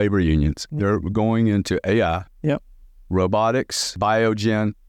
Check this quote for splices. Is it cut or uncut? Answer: cut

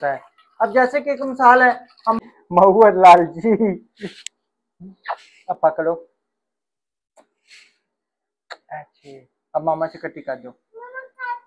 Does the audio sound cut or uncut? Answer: cut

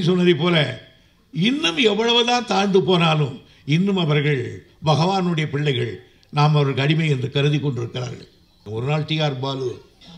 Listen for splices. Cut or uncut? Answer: cut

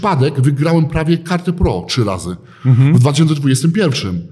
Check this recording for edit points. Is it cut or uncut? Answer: uncut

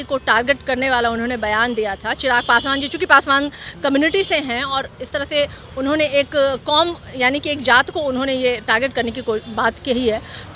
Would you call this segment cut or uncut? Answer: uncut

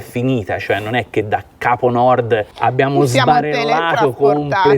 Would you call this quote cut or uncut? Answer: cut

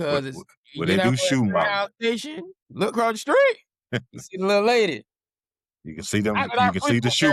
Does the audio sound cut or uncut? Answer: uncut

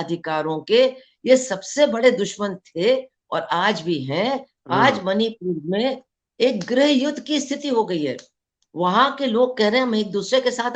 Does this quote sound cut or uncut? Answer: cut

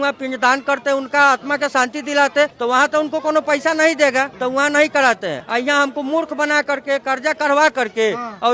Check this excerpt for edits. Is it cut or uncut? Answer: uncut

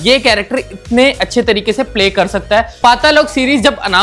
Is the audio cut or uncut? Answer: cut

